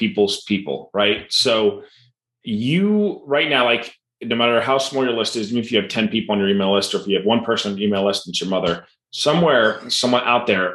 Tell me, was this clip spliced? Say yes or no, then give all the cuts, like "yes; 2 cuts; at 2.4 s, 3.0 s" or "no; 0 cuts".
no; 0 cuts